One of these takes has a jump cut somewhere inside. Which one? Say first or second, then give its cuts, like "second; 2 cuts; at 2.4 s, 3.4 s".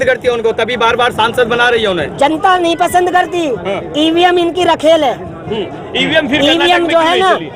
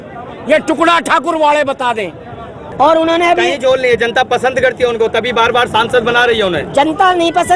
second; 1 cut; at 2.6 s